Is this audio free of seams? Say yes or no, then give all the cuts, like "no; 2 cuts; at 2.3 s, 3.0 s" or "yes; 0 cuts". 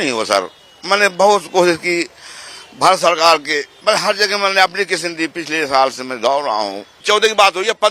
no; 2 cuts; at 3.7 s, 7.0 s